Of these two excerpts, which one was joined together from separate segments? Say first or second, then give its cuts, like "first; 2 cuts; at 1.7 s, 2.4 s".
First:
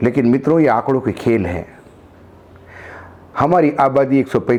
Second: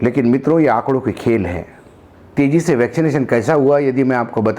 second; 1 cut; at 2.3 s